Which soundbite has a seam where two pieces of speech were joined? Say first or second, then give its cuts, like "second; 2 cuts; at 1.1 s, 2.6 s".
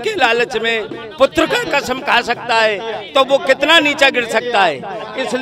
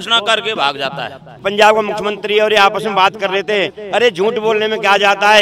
second; 1 cut; at 1.4 s